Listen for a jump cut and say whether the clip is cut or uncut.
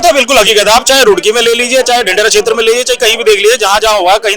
uncut